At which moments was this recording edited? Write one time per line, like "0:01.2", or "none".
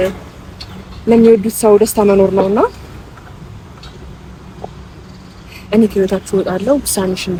none

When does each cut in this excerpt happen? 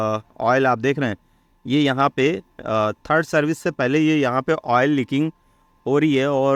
none

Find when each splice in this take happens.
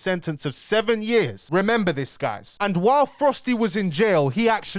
0:01.4
0:02.5

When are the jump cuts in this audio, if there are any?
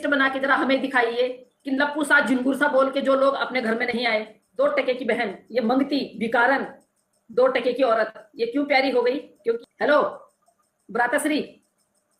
0:04.4
0:09.6

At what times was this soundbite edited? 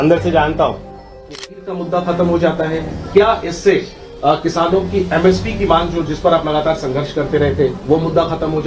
0:01.4

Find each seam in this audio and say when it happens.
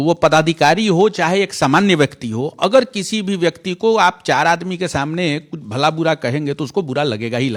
none

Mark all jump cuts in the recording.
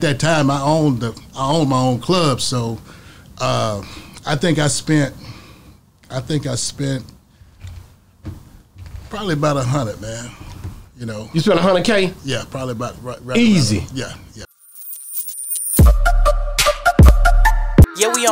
0:14.4

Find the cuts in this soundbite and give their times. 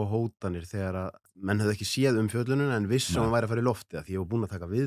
0:01.2

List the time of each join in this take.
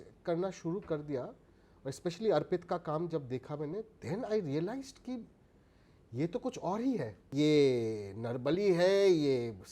0:07.3

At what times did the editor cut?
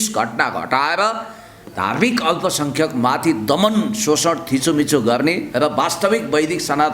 none

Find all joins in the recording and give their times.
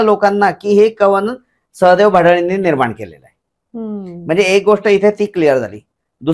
none

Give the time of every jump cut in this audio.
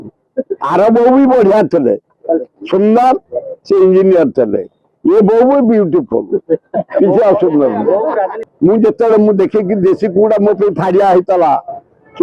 0:08.4

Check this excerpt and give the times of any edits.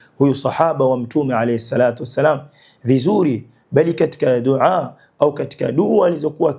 none

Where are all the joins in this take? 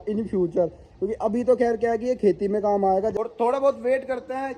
0:03.1

